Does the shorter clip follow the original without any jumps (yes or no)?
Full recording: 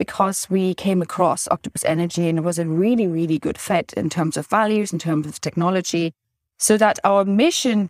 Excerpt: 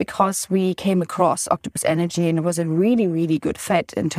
yes